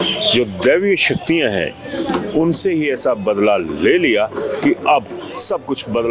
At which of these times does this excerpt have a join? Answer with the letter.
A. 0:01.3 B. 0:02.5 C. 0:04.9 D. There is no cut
D